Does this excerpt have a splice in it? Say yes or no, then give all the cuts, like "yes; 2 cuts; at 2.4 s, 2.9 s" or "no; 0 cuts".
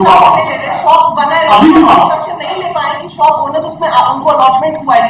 no; 0 cuts